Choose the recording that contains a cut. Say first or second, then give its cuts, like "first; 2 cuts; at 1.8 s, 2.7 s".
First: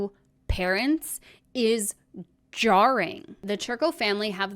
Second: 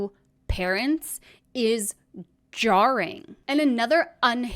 first; 1 cut; at 3.4 s